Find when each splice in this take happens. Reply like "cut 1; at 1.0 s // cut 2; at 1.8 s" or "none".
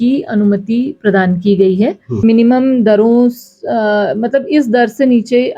cut 1; at 2.1 s